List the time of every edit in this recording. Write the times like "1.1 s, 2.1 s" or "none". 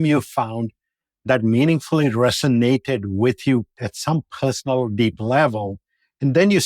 3.8 s